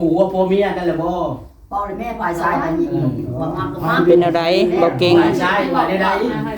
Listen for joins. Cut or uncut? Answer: uncut